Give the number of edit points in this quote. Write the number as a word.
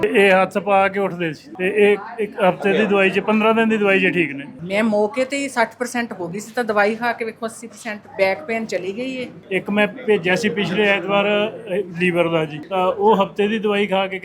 four